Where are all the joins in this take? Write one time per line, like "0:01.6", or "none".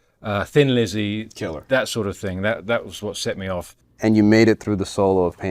0:03.8